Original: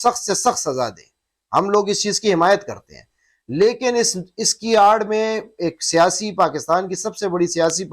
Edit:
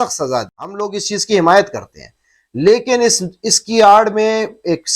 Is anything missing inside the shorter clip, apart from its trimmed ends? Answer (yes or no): yes